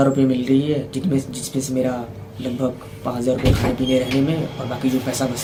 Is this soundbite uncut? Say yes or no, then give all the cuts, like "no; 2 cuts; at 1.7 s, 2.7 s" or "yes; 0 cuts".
yes; 0 cuts